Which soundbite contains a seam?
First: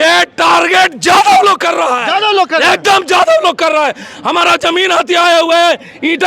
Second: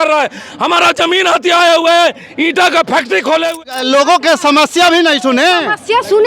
second; 1 cut; at 3.6 s

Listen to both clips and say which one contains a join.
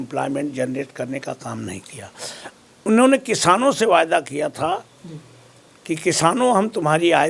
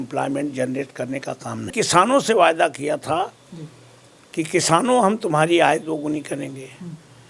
second; 1 cut; at 1.7 s

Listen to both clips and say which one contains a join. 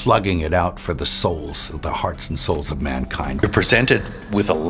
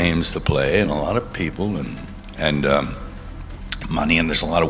first; 1 cut; at 3.4 s

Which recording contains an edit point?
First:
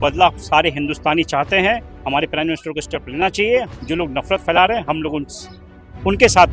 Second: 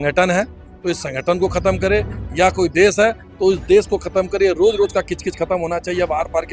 first; 1 cut; at 3.7 s

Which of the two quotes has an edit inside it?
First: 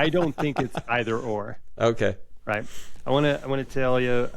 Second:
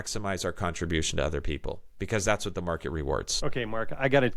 second; 1 cut; at 3.3 s

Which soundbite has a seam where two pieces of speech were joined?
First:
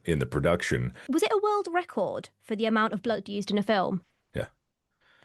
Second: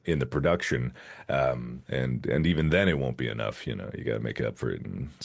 first; 2 cuts; at 0.9 s, 4.2 s

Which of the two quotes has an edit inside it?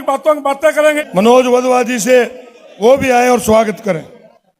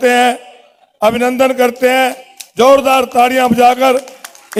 first; 1 cut; at 1.0 s

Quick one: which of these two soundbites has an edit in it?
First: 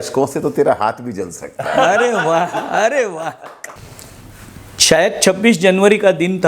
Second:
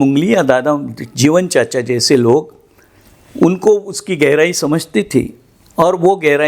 first; 1 cut; at 3.7 s

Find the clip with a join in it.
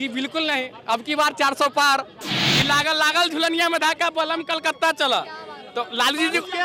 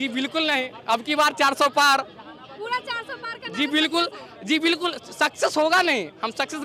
first; 1 cut; at 2.4 s

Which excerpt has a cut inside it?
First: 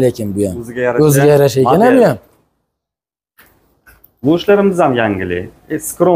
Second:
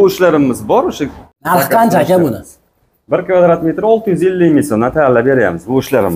second; 1 cut; at 1.3 s

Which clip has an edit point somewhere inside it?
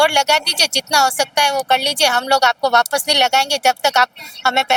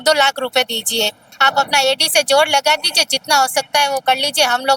second; 1 cut; at 1.3 s

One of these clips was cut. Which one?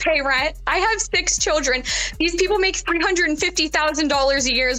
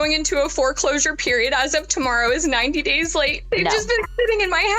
second; 1 cut; at 3.4 s

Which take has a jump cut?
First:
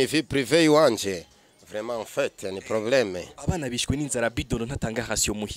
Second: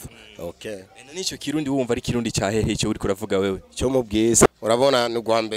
second; 1 cut; at 4.5 s

